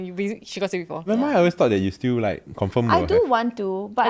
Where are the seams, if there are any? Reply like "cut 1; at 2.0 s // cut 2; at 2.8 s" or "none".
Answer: cut 1; at 1.1 s